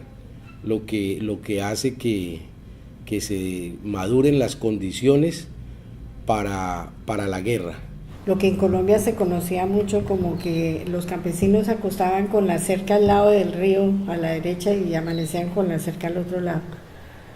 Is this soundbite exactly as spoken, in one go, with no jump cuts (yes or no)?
no